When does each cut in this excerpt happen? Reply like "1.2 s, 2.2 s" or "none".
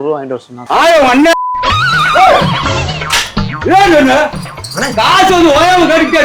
none